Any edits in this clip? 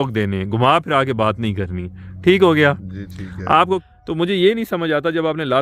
yes; 1 cut; at 3.8 s

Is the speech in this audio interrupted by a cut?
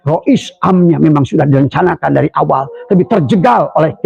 no; 0 cuts

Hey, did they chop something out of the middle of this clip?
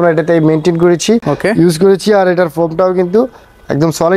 no; 0 cuts

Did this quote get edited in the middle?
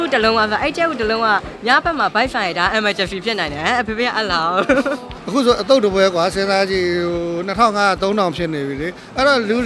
yes; 1 cut; at 5.2 s

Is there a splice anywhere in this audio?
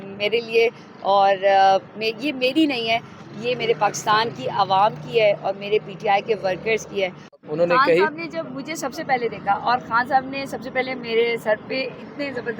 yes; 1 cut; at 7.3 s

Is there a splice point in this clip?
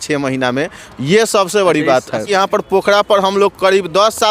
yes; 1 cut; at 2.3 s

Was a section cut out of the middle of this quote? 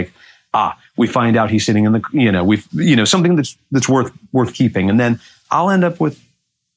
no; 0 cuts

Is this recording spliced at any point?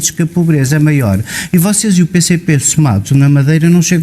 no; 0 cuts

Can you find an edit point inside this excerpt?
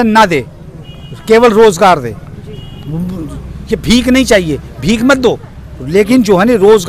no; 0 cuts

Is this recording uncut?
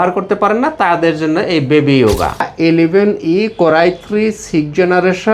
no; 1 cut; at 2.5 s

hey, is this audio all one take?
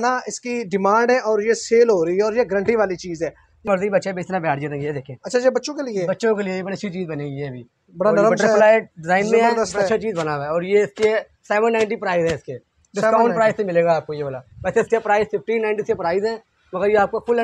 no; 1 cut; at 3.7 s

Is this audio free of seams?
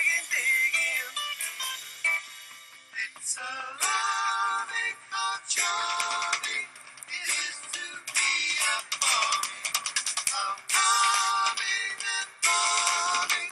no; 1 cut; at 11.2 s

